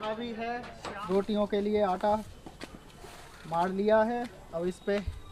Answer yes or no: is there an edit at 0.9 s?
yes